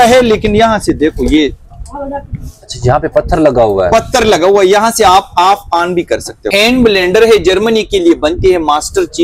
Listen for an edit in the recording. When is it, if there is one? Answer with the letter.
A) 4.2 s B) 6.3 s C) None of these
B